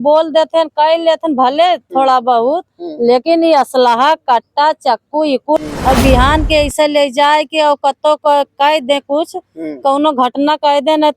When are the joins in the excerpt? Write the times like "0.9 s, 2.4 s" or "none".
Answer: 5.6 s